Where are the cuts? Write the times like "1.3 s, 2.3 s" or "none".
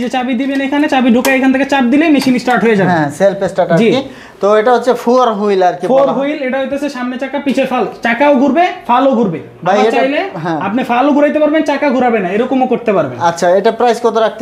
none